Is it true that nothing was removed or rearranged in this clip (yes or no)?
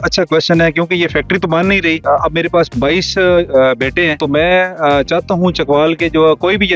no